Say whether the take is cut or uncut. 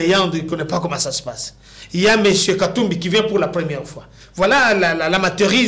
uncut